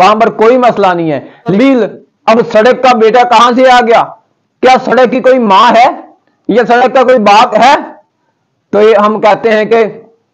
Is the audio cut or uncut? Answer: cut